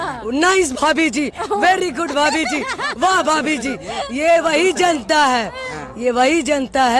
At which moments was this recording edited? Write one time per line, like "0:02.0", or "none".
none